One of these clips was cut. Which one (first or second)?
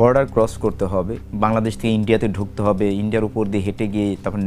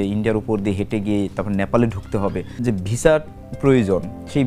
second